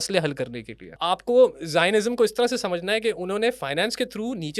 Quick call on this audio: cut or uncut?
cut